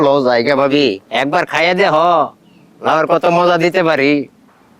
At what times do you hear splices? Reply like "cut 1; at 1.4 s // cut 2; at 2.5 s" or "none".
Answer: cut 1; at 1.1 s